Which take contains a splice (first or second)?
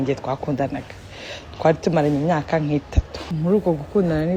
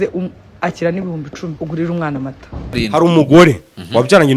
second